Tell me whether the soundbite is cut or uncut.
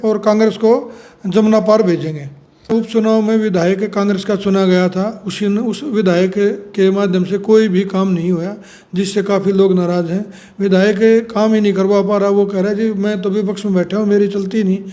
cut